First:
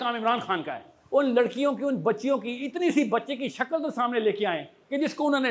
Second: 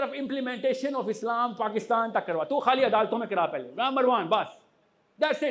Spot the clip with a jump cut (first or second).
first